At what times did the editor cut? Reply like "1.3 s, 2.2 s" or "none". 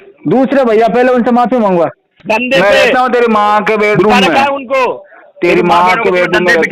2.1 s

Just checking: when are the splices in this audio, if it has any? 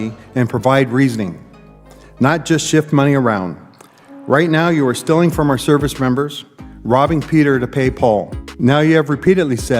8.4 s

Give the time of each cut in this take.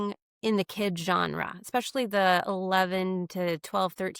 none

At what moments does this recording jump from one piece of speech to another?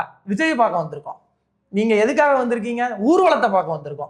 none

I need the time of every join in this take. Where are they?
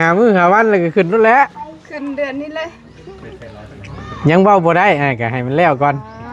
none

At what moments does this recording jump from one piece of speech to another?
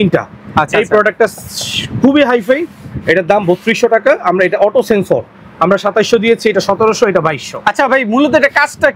none

